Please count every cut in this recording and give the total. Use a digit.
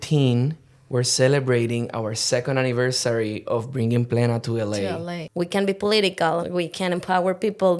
2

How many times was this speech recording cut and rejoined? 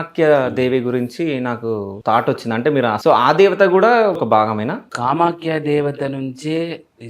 3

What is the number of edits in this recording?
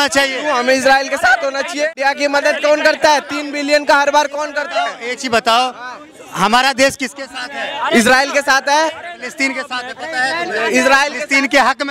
1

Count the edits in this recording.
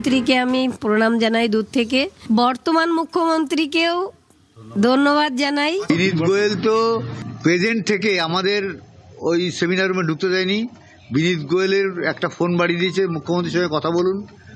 1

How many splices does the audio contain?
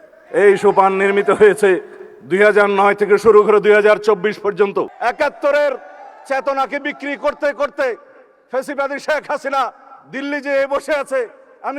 1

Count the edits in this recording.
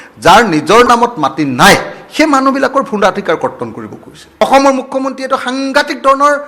1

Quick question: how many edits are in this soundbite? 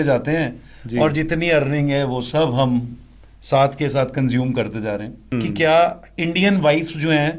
1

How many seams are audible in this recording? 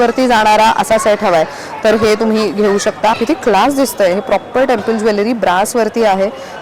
1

